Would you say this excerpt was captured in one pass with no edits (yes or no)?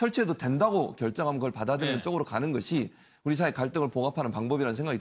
no